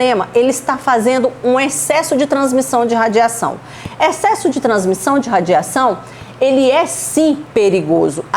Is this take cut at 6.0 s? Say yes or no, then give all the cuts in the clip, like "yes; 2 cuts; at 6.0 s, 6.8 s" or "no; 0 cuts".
no; 1 cut; at 7.4 s